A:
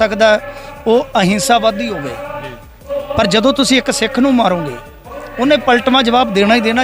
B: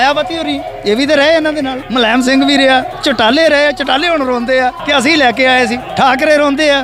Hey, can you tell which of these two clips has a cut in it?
B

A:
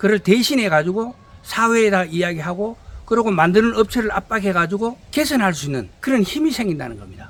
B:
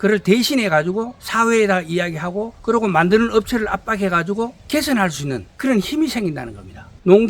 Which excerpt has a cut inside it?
B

